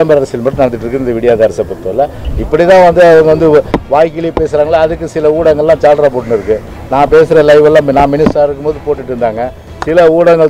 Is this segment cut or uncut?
cut